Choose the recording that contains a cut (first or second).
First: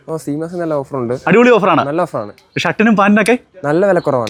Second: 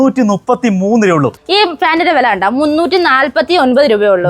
second